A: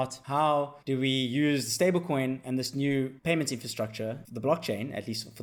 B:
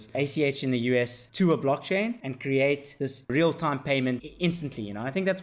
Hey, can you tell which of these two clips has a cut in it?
B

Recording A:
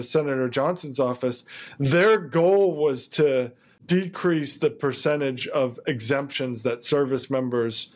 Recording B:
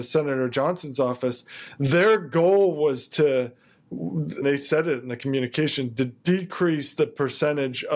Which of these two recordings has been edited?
A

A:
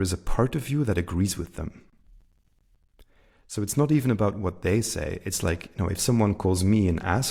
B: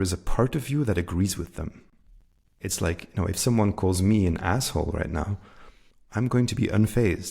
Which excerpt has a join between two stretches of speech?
B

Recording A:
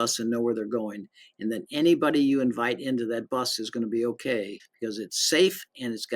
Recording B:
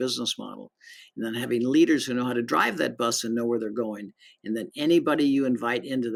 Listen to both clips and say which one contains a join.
A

